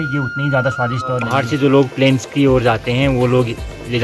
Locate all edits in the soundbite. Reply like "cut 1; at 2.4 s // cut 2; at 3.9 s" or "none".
cut 1; at 1.4 s